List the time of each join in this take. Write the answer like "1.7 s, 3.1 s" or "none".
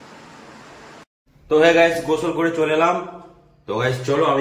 1.3 s